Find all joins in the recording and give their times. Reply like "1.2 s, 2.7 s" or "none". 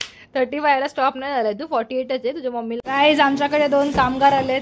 2.8 s